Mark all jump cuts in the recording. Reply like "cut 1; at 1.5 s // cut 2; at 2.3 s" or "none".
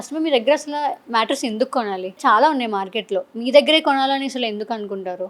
cut 1; at 2.2 s